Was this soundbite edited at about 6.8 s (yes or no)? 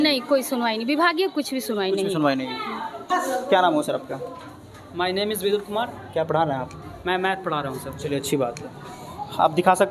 no